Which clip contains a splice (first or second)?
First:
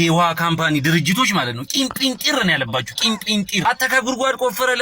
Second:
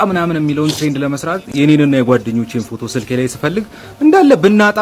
first